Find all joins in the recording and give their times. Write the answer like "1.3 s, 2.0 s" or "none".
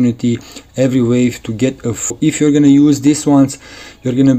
2.2 s